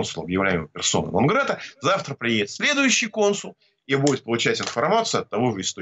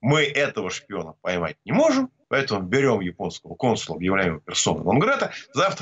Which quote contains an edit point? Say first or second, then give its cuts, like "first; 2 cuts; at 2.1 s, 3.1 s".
second; 1 cut; at 2.2 s